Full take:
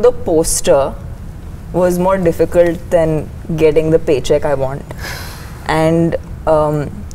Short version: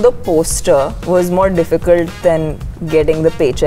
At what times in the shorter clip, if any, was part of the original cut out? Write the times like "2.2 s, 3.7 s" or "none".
1.0 s